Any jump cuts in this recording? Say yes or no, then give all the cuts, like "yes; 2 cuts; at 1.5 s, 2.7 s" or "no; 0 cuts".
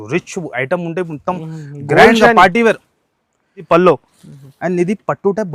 yes; 1 cut; at 3.7 s